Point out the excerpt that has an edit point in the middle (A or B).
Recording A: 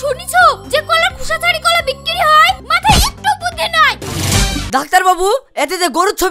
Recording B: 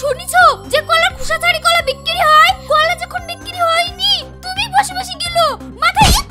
A